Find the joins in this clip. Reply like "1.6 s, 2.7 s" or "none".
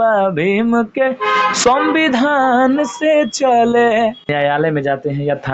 4.3 s